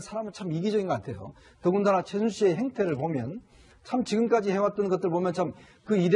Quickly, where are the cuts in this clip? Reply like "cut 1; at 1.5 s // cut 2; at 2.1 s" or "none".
cut 1; at 2.4 s